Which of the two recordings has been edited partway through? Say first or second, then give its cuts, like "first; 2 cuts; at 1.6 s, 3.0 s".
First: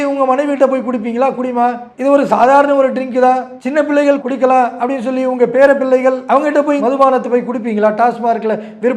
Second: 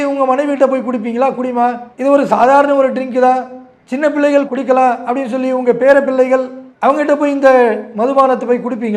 first; 2 cuts; at 3.6 s, 6.6 s